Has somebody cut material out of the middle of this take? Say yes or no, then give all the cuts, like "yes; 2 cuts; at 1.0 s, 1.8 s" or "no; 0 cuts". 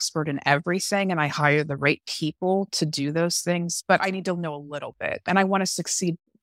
yes; 1 cut; at 5.2 s